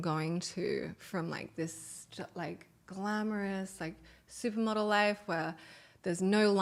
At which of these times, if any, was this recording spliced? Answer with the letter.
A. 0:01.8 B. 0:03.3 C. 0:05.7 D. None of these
D